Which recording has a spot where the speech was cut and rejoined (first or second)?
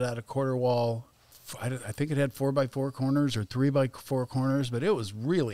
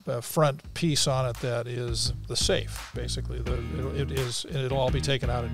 first